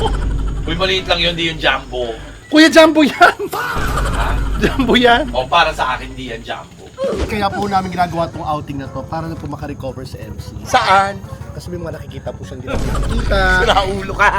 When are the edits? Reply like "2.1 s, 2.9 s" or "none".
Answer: 7.3 s